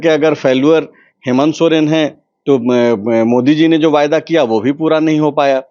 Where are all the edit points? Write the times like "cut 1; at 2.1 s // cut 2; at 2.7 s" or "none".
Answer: none